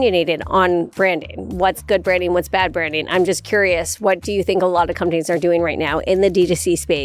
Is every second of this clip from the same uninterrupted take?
yes; 0 cuts

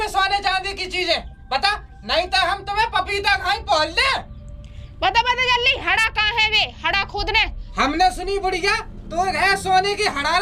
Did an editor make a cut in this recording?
yes; 1 cut; at 7.6 s

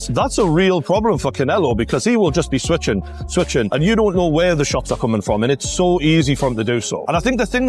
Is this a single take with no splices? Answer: yes; 0 cuts

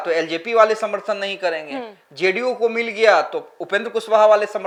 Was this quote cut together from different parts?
no; 0 cuts

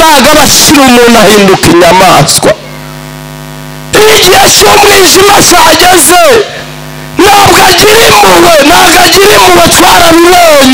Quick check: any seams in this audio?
no; 0 cuts

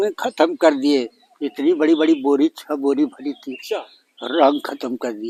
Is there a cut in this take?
no; 0 cuts

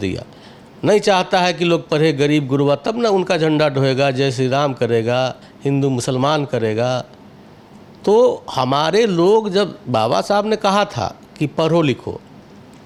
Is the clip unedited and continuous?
yes; 0 cuts

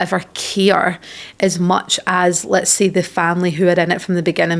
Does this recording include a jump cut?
no; 0 cuts

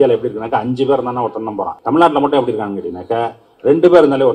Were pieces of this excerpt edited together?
yes; 1 cut; at 1.8 s

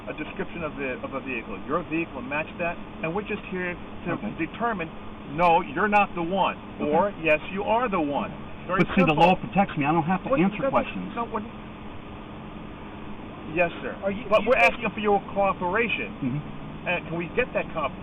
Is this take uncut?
yes; 0 cuts

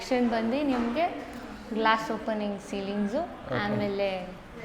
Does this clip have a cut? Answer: no; 0 cuts

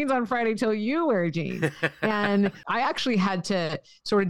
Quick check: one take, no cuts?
no; 1 cut; at 2.6 s

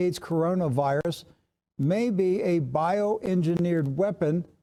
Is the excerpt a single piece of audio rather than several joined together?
yes; 0 cuts

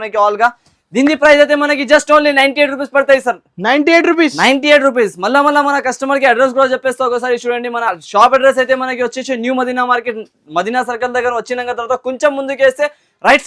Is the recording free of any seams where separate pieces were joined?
yes; 0 cuts

